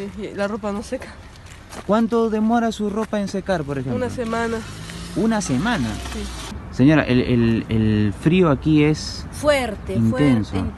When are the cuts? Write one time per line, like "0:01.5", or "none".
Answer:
0:06.7